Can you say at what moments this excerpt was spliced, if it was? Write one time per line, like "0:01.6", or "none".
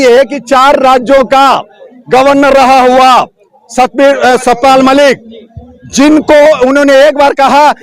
none